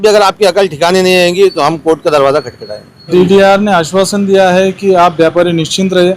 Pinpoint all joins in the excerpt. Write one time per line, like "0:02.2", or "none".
0:03.0